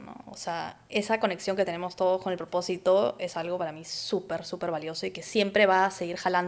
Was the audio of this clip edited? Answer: no; 0 cuts

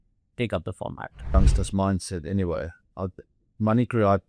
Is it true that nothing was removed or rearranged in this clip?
no; 1 cut; at 1.4 s

